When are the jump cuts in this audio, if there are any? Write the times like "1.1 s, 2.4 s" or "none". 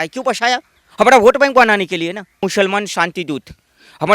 2.4 s